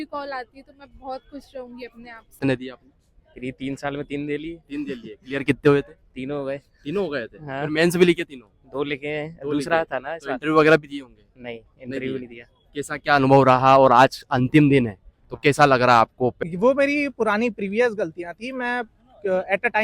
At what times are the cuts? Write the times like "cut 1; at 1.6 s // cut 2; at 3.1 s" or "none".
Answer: cut 1; at 2.4 s // cut 2; at 16.4 s